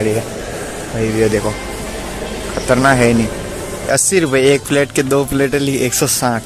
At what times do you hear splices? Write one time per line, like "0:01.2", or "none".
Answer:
0:03.9